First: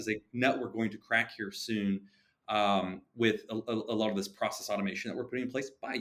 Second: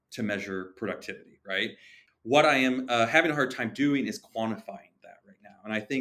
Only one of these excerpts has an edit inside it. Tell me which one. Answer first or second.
second